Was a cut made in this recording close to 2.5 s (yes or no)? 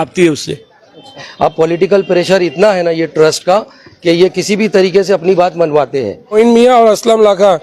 no